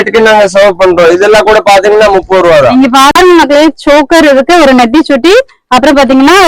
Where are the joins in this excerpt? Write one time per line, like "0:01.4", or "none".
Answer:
0:03.1